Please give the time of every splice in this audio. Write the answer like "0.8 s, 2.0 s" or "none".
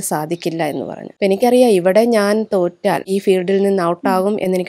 1.0 s, 3.1 s